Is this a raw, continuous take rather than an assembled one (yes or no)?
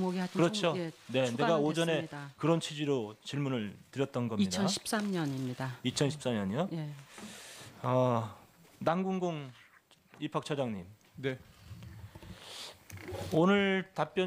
yes